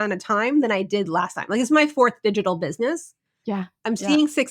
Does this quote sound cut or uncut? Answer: uncut